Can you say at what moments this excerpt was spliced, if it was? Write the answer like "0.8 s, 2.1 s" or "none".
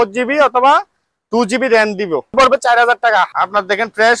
2.3 s, 3.3 s